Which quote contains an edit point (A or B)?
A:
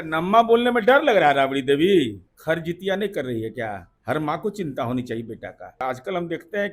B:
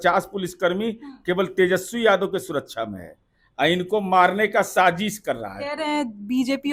A